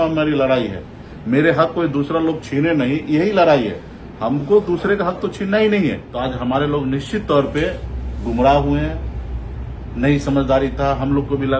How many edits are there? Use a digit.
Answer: 1